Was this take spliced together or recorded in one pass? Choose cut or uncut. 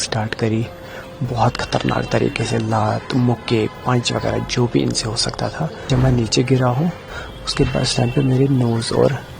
cut